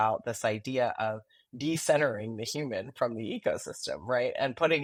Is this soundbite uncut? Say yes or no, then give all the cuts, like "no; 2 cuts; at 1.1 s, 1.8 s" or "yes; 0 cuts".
yes; 0 cuts